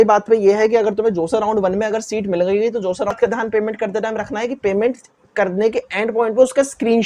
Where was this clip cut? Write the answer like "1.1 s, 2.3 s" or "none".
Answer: 3.1 s